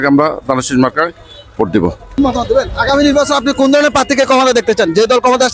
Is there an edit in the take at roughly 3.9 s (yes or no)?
no